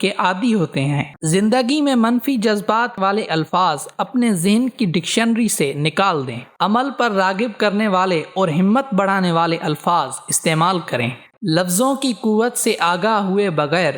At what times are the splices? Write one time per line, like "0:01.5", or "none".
0:01.1
0:03.1
0:11.3